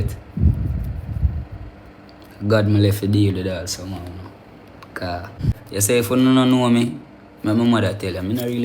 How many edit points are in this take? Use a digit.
1